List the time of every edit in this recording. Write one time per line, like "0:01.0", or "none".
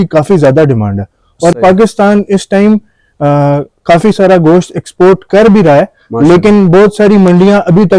none